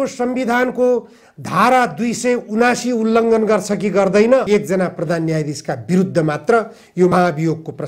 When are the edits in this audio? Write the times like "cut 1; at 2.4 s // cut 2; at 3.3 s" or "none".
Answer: cut 1; at 4.5 s